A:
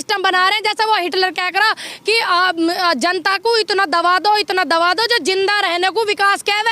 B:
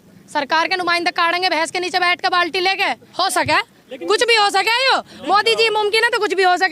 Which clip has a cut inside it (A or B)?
B